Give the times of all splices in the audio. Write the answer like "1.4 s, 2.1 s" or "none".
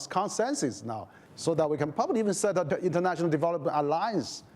2.7 s